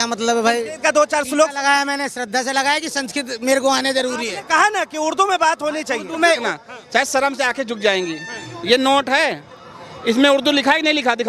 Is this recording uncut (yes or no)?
no